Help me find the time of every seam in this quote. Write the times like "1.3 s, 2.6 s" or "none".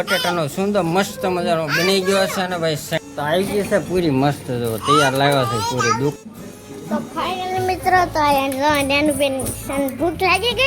3.0 s, 6.1 s